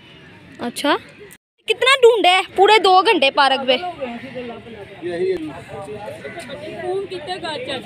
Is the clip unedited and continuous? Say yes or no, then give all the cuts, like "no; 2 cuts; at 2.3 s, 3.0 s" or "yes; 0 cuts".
no; 1 cut; at 1.7 s